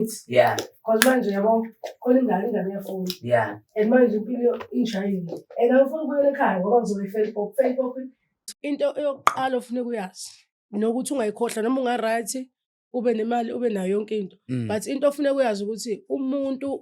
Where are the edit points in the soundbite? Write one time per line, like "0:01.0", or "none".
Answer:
0:08.3